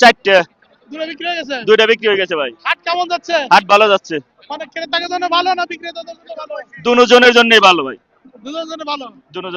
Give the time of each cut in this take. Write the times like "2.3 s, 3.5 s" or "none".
none